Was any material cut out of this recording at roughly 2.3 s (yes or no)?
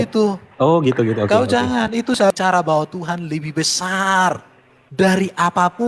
yes